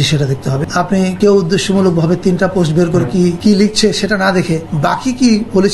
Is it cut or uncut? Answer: cut